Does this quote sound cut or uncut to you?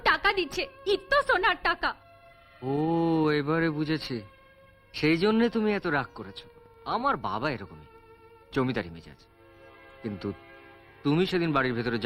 uncut